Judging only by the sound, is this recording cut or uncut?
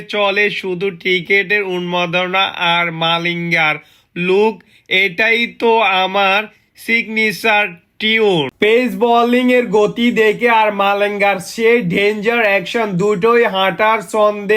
cut